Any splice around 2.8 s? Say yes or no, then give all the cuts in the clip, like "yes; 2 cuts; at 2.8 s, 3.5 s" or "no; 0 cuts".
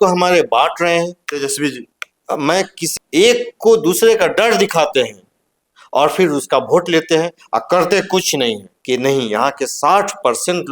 yes; 2 cuts; at 2.8 s, 8.7 s